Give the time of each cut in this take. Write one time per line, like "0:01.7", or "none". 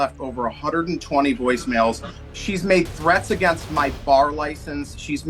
0:02.1